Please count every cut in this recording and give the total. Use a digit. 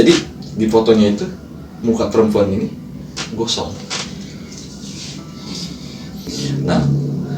1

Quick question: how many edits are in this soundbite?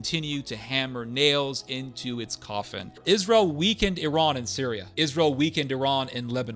2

